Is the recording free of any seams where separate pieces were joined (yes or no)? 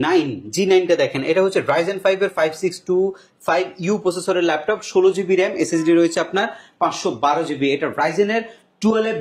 yes